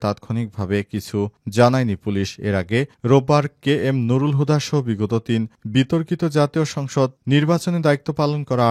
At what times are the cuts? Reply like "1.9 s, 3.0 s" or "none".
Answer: none